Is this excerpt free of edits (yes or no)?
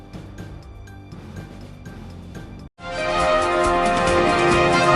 yes